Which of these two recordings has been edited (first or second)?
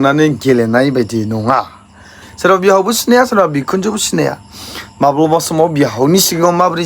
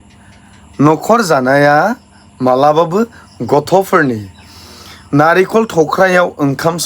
first